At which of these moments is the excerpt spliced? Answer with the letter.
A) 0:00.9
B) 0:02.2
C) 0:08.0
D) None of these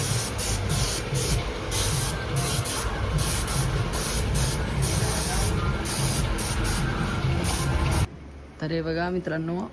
C